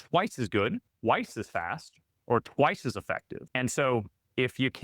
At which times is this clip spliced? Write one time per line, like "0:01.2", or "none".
0:00.9
0:03.4